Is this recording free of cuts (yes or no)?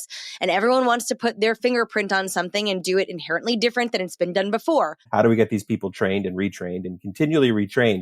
no